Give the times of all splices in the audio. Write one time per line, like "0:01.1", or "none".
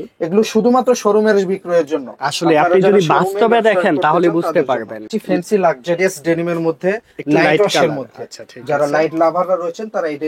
0:05.1

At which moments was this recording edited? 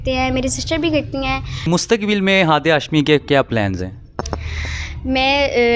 0:01.7

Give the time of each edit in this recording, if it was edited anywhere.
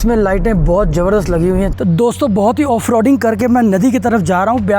0:01.7

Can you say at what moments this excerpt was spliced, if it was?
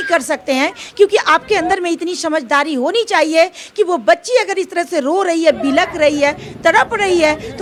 none

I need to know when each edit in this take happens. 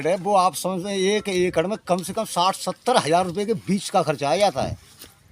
none

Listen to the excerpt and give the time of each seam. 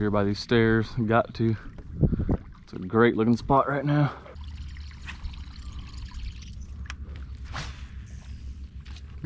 0:04.3

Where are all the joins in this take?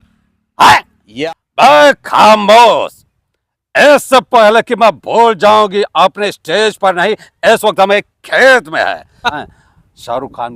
0:01.0
0:09.4

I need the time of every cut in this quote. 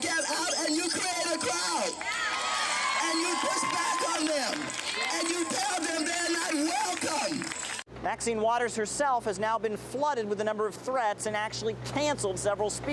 none

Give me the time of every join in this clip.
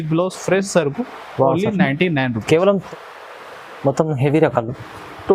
0:02.8

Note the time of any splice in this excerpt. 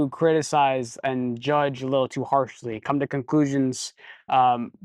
none

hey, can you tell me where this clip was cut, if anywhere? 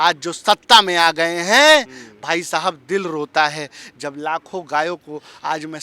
none

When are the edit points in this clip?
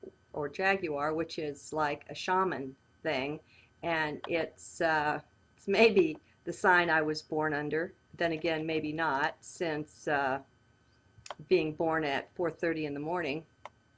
none

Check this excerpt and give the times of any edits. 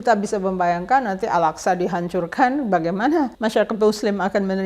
0:03.3

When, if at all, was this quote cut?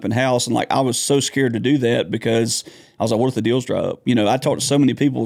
none

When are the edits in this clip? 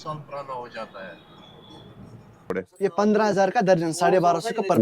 0:02.5

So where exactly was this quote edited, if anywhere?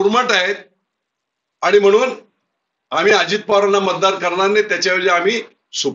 none

